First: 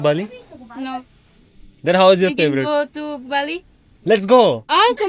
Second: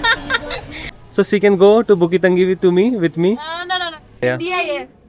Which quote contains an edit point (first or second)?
second